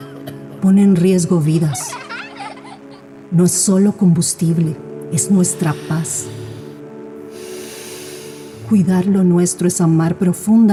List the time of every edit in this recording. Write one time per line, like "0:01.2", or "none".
none